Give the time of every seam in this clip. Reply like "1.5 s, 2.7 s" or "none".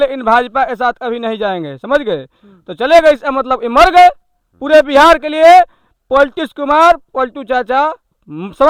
none